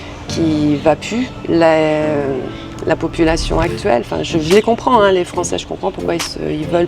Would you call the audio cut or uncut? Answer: uncut